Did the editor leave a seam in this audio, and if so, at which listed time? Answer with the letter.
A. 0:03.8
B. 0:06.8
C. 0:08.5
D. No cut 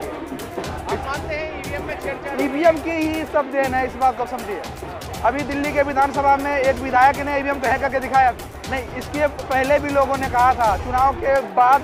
C